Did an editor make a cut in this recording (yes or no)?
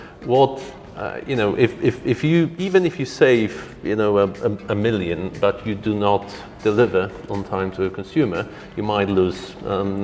no